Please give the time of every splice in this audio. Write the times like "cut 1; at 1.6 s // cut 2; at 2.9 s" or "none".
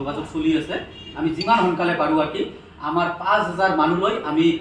none